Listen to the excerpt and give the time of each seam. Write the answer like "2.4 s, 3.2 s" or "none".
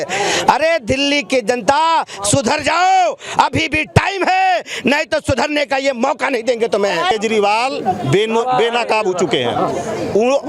7.1 s